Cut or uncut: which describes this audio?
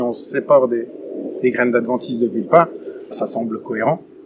cut